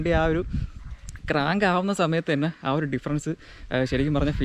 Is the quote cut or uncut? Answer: uncut